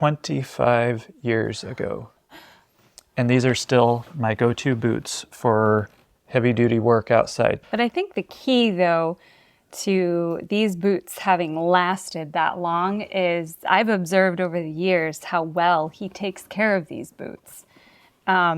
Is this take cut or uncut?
cut